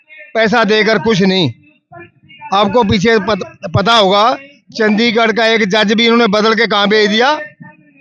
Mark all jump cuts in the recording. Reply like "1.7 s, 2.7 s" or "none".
none